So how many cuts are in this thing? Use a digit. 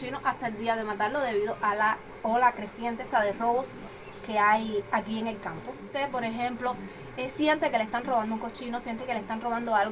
1